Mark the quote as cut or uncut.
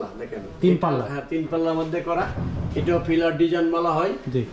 uncut